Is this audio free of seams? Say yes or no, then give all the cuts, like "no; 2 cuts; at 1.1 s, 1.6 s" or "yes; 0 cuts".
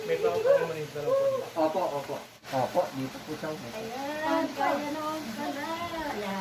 no; 1 cut; at 2.2 s